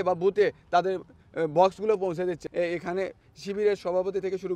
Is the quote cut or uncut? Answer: cut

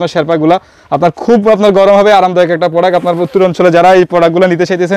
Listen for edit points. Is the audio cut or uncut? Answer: uncut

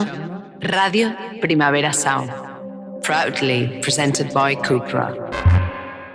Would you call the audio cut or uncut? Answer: uncut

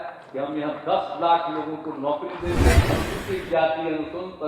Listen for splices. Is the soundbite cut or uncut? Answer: cut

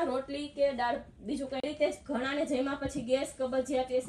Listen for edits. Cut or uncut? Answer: cut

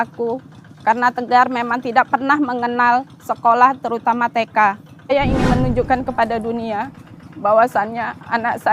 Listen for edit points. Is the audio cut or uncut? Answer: cut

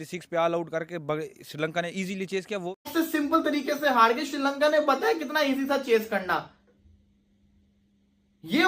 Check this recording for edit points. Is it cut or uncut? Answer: cut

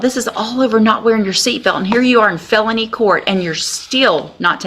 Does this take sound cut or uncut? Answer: uncut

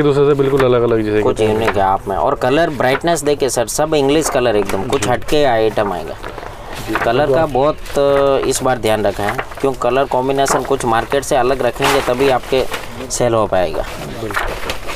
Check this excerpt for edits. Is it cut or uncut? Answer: uncut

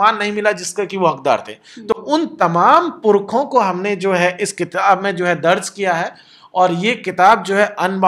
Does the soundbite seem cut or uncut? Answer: uncut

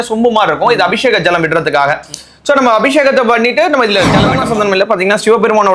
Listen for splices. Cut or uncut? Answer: cut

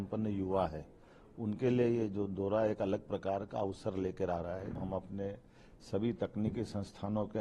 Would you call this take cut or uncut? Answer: cut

